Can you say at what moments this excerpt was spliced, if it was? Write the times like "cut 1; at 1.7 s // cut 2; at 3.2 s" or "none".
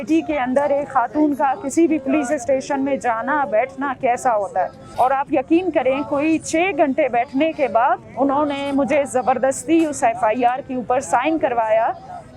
cut 1; at 4.8 s